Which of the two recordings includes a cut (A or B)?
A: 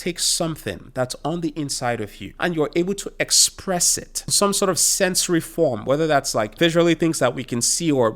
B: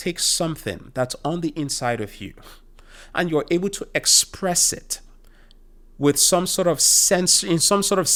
A